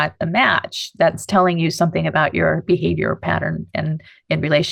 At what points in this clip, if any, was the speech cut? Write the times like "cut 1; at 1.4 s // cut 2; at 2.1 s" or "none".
none